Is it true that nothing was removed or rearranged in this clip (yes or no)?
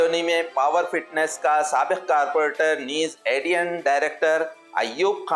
yes